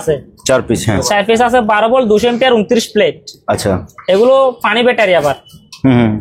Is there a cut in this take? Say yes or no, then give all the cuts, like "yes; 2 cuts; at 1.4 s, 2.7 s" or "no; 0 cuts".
no; 0 cuts